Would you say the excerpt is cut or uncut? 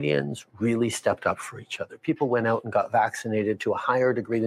cut